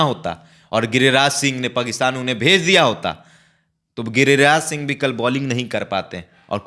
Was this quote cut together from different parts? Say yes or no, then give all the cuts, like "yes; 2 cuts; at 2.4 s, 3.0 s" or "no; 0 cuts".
no; 0 cuts